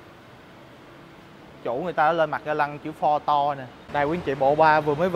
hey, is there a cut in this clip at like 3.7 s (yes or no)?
yes